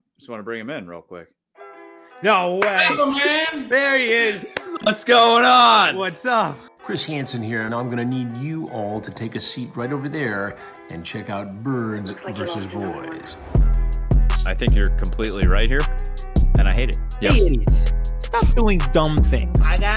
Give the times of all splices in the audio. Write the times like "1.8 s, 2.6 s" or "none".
6.7 s